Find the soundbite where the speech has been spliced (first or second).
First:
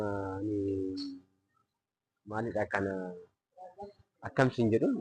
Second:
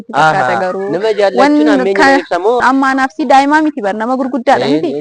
second